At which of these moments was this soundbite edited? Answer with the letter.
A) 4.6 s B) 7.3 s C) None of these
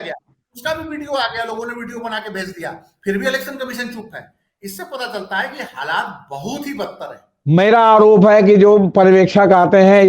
B